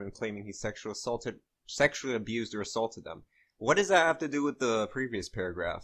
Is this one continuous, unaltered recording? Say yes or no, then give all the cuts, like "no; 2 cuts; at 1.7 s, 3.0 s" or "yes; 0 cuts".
no; 1 cut; at 4.9 s